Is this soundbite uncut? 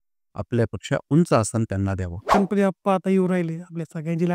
no; 1 cut; at 2.3 s

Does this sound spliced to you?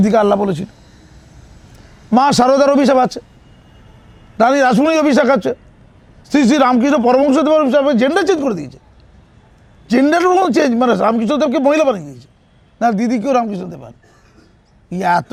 no; 0 cuts

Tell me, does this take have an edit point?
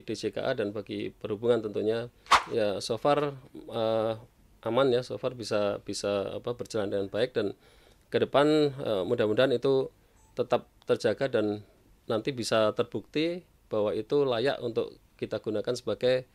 yes; 1 cut; at 2.4 s

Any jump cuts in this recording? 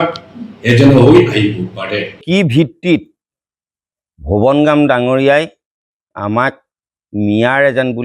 yes; 1 cut; at 2.2 s

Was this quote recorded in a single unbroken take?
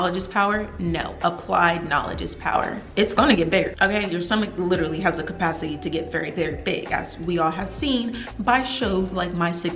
no; 2 cuts; at 2.8 s, 3.7 s

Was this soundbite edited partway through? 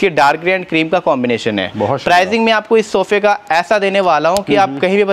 no; 0 cuts

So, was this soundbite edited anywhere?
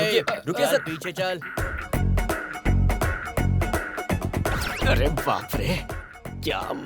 yes; 1 cut; at 1.5 s

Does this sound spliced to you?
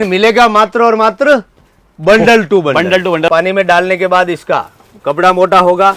yes; 1 cut; at 3.3 s

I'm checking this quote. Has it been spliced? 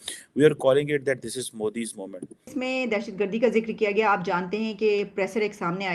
yes; 1 cut; at 2.5 s

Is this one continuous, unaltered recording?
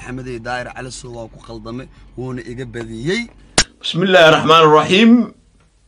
no; 1 cut; at 3.4 s

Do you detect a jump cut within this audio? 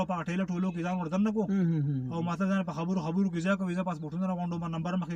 no; 0 cuts

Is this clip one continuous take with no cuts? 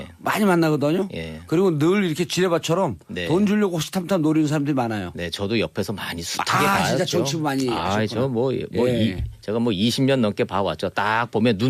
yes; 0 cuts

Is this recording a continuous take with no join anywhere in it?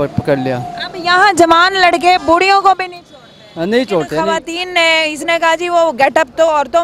no; 1 cut; at 4.2 s

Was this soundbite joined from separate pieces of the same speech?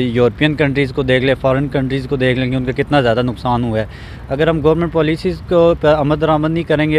no; 0 cuts

